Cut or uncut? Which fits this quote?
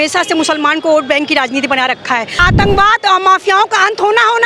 cut